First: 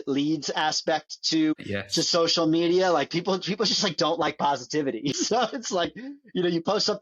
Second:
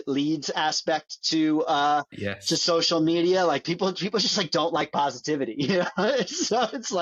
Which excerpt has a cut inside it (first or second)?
first